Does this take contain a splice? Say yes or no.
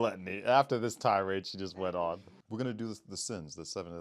yes